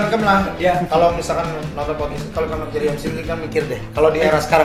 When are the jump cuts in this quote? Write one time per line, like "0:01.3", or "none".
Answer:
none